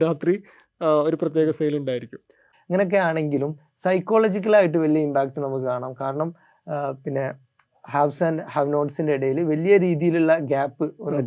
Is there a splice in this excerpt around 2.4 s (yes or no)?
yes